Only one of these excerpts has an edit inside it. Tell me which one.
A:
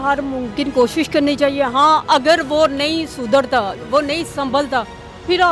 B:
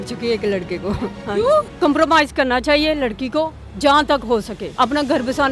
B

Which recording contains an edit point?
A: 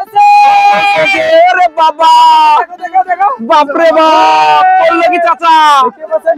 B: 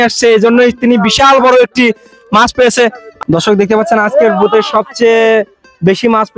B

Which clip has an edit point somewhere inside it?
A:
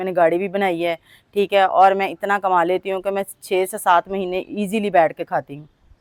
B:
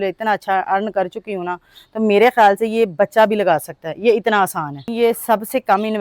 B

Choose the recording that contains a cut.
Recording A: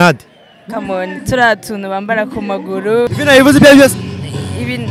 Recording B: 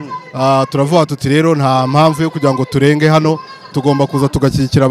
A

